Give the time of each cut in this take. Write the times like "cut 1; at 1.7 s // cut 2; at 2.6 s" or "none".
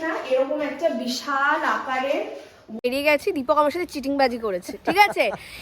cut 1; at 2.8 s